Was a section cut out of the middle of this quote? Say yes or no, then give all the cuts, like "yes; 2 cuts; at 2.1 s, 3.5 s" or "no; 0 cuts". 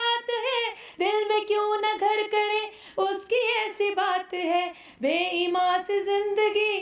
no; 0 cuts